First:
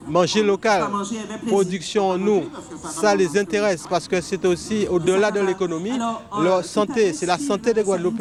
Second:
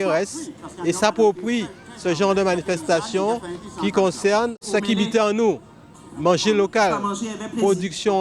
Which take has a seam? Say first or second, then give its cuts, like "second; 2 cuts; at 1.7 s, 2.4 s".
second; 1 cut; at 4.6 s